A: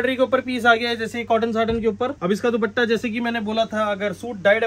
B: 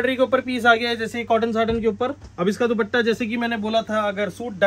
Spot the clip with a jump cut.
A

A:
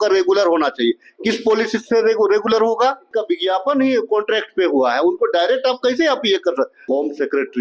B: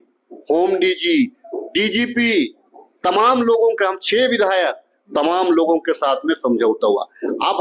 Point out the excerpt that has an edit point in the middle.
A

